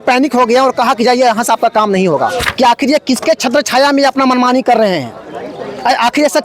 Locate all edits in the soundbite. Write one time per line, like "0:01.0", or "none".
0:02.4